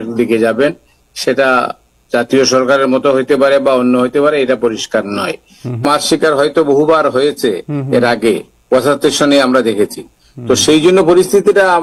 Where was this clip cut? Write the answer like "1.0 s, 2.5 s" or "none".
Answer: 5.8 s